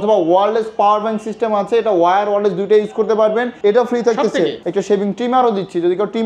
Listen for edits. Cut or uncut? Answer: cut